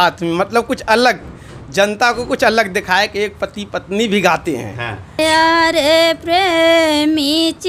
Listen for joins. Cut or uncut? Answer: cut